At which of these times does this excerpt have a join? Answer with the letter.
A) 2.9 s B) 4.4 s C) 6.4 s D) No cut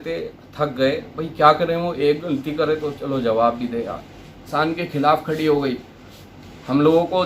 B